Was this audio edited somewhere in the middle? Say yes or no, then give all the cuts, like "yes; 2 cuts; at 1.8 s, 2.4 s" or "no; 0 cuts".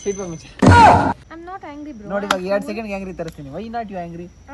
yes; 1 cut; at 1.3 s